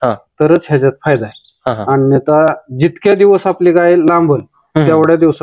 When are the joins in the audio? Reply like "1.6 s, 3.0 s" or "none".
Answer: none